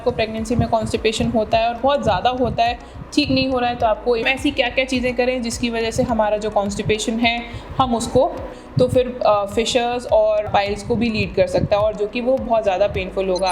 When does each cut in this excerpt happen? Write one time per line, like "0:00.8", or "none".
0:04.2
0:08.6
0:10.5